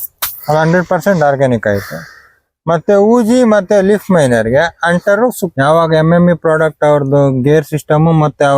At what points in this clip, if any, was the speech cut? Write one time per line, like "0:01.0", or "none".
0:05.4